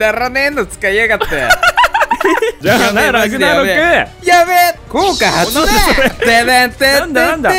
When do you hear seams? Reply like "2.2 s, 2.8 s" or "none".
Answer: 2.6 s, 4.8 s